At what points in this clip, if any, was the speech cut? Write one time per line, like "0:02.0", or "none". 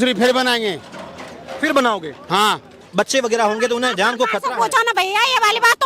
0:02.8